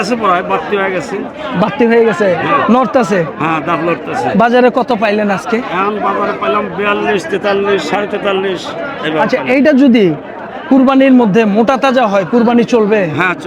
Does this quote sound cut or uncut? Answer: uncut